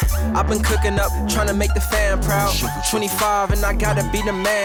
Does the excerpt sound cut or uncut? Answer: uncut